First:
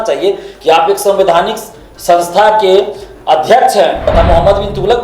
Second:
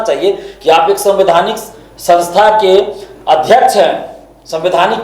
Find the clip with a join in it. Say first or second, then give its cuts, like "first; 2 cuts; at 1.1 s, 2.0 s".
first; 1 cut; at 4.1 s